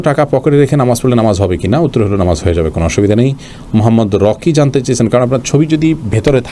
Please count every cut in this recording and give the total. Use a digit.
0